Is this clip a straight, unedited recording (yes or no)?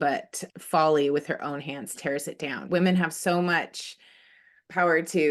no